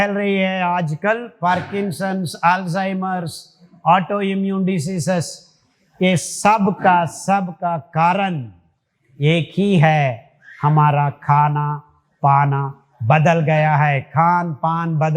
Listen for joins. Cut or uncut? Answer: uncut